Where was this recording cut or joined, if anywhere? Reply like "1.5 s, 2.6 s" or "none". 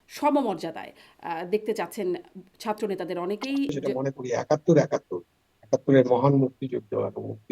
3.9 s